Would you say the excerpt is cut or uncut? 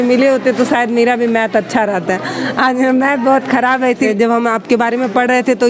uncut